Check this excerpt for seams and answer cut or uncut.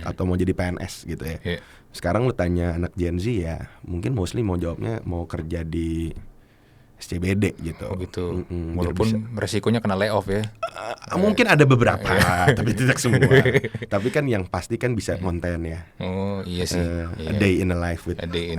uncut